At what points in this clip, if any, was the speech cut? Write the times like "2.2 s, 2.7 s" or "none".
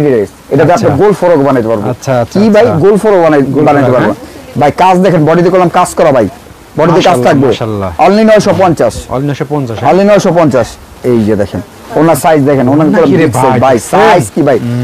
none